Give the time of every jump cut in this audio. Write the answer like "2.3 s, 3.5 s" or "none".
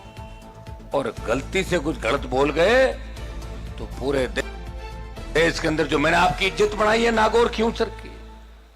0.9 s